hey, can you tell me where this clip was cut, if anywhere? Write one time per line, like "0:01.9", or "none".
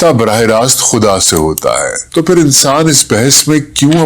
0:02.0